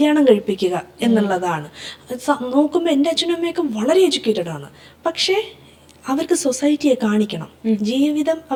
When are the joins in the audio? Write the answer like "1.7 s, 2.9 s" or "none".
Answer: none